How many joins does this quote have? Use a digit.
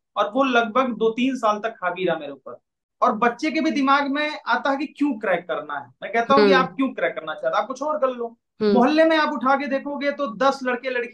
1